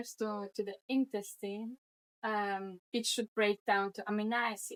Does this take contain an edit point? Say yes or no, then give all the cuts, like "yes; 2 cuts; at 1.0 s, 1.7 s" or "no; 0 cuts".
no; 0 cuts